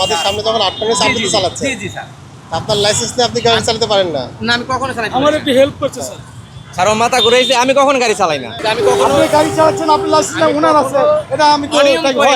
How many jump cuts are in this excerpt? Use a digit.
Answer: 1